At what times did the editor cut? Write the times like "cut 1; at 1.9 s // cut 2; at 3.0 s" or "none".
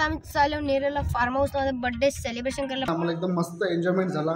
cut 1; at 2.9 s